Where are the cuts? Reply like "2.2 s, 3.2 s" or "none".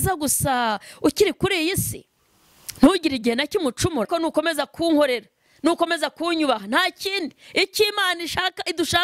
4.1 s